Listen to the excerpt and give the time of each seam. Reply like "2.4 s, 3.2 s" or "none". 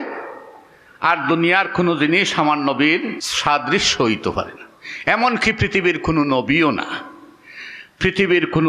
3.3 s